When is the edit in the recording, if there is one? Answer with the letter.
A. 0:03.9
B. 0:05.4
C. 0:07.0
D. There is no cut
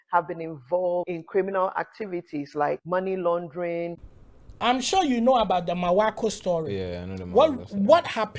A